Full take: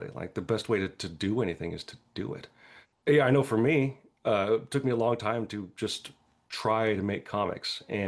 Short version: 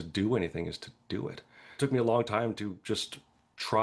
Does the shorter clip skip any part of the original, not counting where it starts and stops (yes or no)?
yes